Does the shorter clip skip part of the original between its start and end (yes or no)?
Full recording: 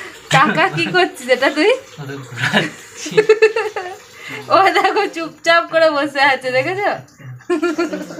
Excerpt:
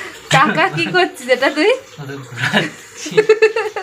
no